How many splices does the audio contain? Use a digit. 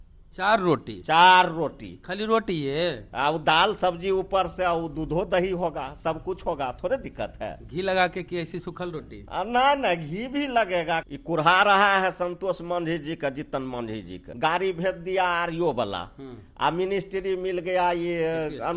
2